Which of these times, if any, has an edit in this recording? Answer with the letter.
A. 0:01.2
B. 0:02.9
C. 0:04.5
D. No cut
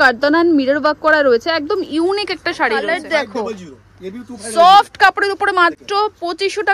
B